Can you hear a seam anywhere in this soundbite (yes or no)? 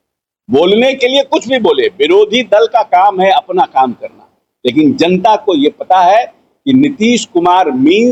no